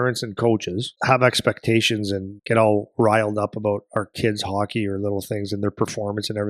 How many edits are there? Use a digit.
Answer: 2